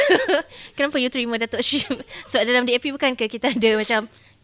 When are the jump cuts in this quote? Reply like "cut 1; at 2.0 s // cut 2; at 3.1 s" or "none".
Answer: none